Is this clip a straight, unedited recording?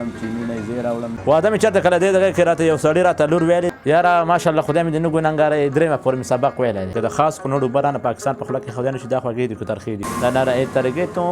no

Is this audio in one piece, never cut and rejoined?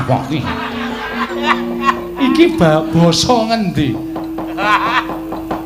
no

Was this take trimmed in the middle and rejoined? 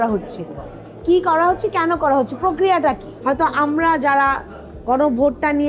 yes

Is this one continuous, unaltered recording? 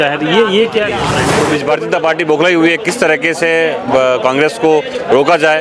no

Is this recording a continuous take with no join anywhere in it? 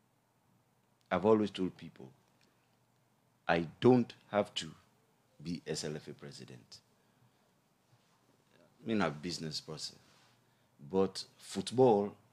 yes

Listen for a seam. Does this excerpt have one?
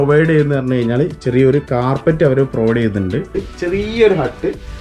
yes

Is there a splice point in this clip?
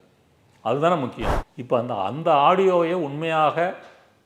yes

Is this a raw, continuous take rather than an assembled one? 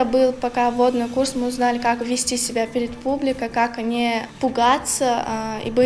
no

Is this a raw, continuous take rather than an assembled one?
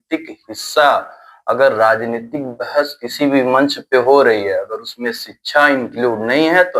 yes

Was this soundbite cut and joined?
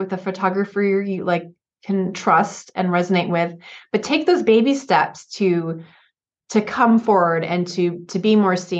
no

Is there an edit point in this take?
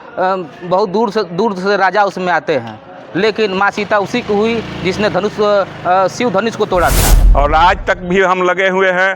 yes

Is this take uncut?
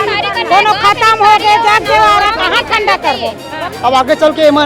no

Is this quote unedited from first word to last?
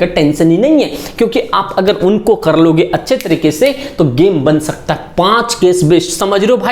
yes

